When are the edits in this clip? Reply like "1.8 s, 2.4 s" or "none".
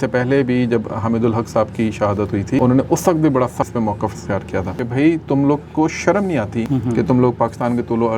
2.6 s, 3.7 s, 4.8 s, 6.7 s